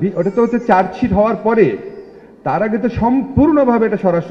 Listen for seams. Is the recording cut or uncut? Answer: uncut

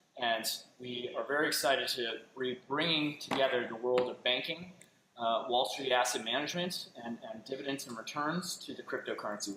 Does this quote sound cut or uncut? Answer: uncut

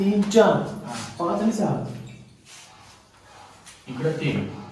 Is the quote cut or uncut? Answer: uncut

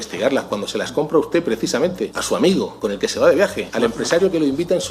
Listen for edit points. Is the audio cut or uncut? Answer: cut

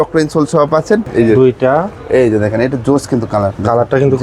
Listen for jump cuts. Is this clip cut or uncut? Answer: cut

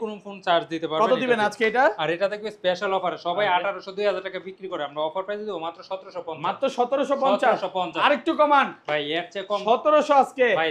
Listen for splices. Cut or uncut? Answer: uncut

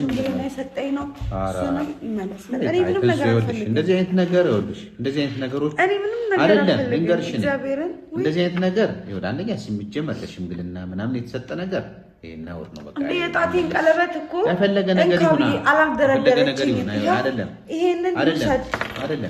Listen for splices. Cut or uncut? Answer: uncut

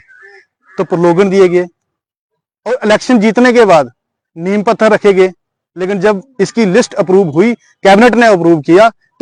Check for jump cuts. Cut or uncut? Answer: uncut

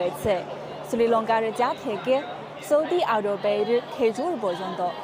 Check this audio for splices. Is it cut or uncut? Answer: uncut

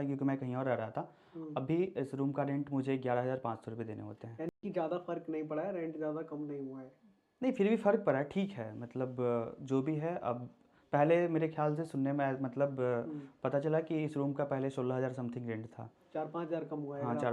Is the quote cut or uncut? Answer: uncut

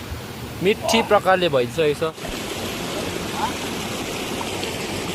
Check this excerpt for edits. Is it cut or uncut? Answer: cut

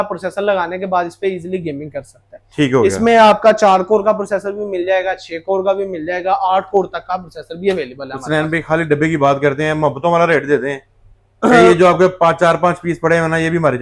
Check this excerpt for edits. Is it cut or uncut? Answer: uncut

